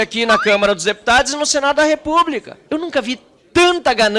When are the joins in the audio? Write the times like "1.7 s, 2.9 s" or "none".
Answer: 2.6 s